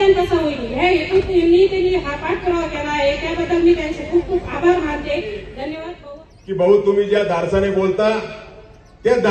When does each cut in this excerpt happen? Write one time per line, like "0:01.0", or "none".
0:05.9